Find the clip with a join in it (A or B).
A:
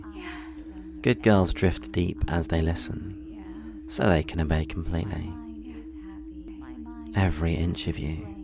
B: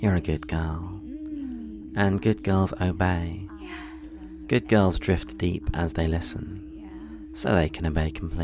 A